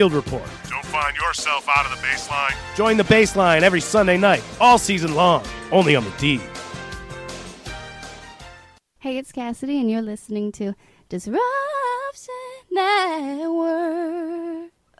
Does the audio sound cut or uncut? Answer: uncut